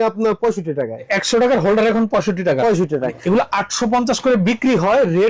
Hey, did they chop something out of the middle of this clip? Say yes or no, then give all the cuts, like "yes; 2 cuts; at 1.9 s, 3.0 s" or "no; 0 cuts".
yes; 2 cuts; at 1.1 s, 3.2 s